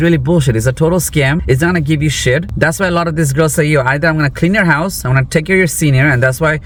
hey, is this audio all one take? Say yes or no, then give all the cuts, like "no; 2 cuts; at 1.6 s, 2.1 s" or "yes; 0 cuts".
yes; 0 cuts